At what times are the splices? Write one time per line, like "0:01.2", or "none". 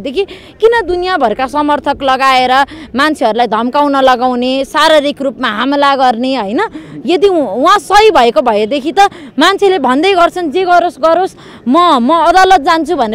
none